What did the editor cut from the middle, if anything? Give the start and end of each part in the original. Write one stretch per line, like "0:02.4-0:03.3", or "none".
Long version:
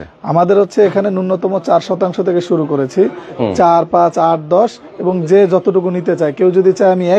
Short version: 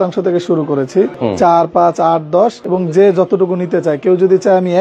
0:03.2-0:03.3
0:04.8-0:05.0

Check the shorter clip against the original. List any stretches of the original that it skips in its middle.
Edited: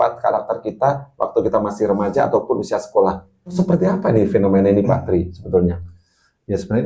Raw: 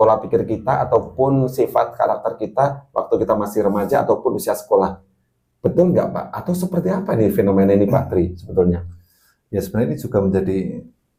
0:05.1-0:06.4

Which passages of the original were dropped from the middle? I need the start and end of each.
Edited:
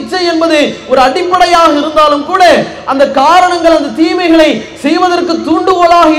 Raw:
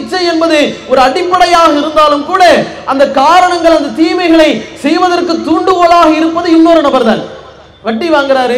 none

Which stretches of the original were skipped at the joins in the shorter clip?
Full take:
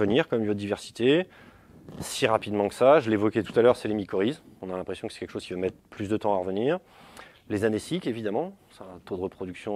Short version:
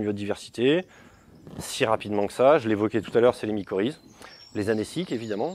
0:04.5-0:07.1

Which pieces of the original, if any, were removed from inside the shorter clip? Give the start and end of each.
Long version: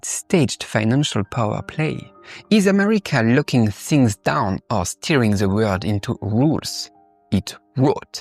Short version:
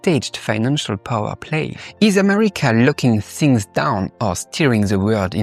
0:02.1-0:02.3

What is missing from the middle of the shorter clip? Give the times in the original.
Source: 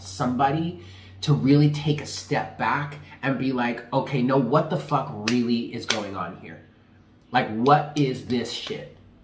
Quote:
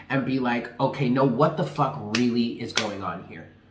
none

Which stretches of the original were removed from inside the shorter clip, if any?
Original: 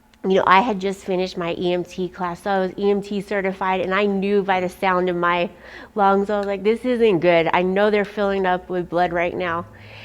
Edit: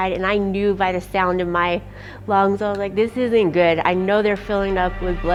none

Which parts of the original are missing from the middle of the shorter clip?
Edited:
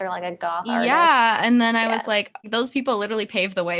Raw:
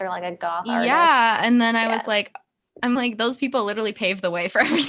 0:02.5-0:03.1

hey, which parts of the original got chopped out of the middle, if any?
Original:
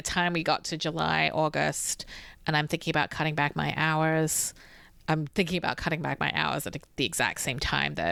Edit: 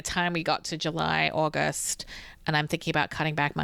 none

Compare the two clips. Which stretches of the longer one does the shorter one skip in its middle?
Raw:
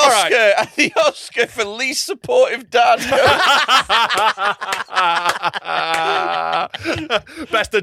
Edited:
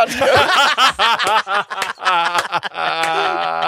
none

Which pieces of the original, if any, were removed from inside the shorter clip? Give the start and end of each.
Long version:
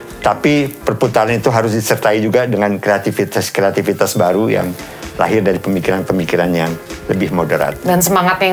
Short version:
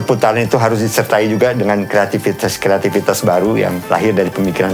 0:04.7-0:05.1

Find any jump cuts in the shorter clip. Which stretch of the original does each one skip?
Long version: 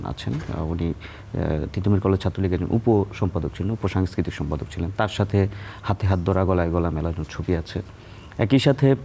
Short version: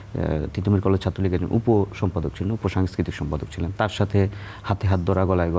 none

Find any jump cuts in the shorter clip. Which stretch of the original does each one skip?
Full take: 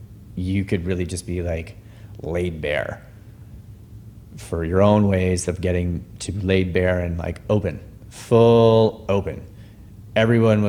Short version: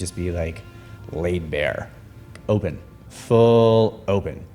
0:03.5-0:07.4

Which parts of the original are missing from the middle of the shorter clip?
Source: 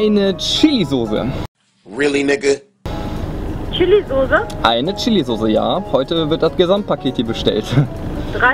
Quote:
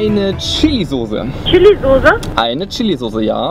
0:01.4-0:03.6

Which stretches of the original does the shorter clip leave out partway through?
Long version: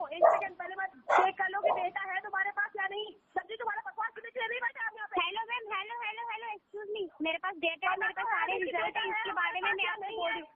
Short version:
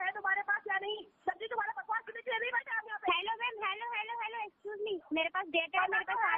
none

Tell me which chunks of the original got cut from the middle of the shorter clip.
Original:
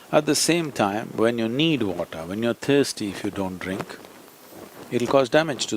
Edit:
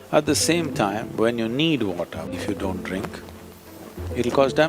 0:02.3-0:03.1

